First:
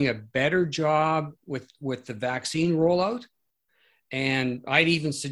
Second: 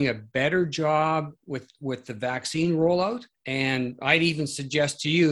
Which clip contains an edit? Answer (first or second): second